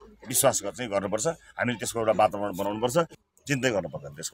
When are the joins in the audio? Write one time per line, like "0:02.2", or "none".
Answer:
0:03.2